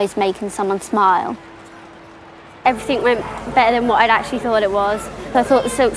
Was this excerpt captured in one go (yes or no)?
yes